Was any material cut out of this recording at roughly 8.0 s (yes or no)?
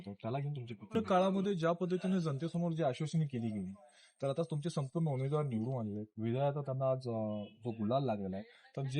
no